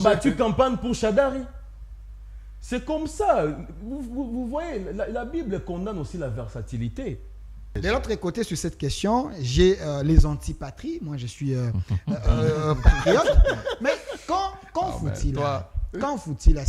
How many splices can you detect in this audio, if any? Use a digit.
1